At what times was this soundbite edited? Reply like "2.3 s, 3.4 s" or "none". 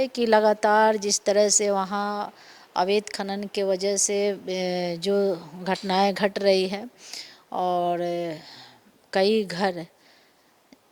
none